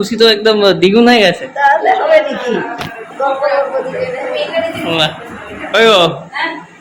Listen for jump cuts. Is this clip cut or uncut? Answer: uncut